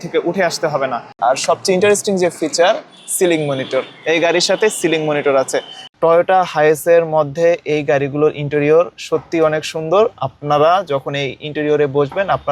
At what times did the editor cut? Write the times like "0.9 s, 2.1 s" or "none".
1.2 s, 5.8 s